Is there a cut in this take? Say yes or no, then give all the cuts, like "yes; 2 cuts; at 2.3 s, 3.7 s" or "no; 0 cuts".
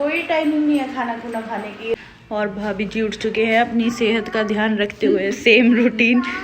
yes; 1 cut; at 1.9 s